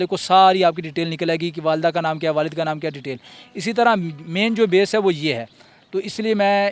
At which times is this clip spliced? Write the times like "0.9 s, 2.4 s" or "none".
none